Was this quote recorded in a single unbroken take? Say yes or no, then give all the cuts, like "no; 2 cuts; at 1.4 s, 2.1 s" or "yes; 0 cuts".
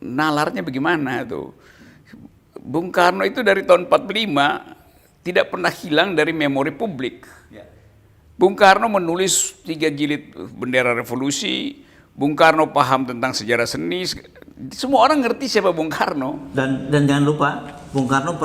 yes; 0 cuts